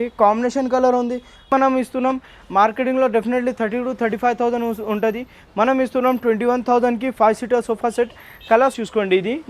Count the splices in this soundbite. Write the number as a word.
two